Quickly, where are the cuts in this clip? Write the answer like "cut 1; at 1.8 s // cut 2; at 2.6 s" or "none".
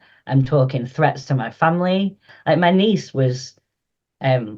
cut 1; at 2.3 s